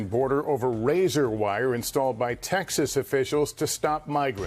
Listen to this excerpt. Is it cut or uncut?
uncut